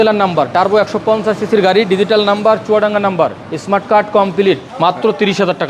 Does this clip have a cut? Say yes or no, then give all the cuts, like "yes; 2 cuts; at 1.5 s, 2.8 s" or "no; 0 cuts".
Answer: yes; 2 cuts; at 3.5 s, 4.7 s